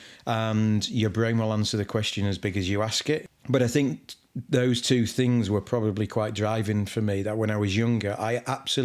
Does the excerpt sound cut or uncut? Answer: cut